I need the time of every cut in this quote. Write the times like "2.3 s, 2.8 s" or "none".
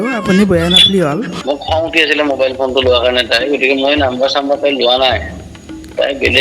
1.3 s